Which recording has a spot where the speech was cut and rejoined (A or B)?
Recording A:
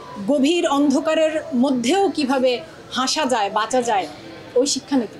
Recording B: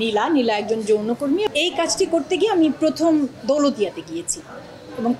B